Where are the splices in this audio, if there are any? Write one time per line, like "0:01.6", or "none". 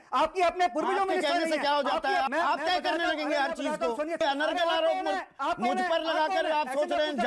0:02.3
0:04.2